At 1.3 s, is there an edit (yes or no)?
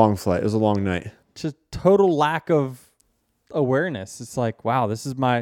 yes